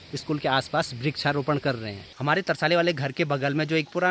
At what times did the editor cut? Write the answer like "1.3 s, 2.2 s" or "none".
2.0 s